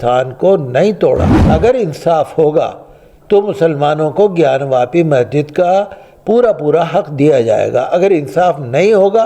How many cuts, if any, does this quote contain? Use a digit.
1